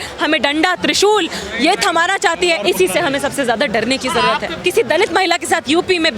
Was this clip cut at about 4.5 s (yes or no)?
yes